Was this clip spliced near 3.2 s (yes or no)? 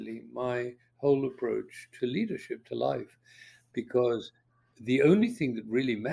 no